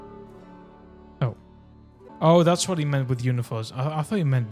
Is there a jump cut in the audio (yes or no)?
yes